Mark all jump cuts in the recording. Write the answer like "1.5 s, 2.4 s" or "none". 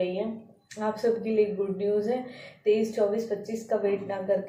none